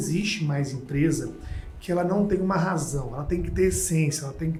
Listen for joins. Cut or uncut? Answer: uncut